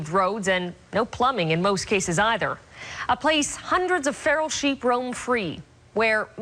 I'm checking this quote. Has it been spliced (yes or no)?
no